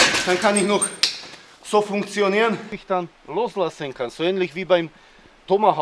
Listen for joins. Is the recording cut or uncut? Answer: cut